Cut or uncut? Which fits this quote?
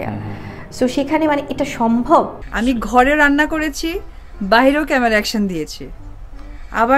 cut